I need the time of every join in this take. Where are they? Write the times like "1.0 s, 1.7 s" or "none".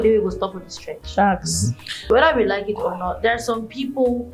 2.0 s